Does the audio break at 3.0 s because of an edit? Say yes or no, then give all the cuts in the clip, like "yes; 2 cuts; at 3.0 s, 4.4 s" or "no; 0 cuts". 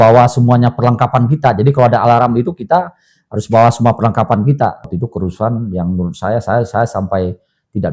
no; 1 cut; at 5.0 s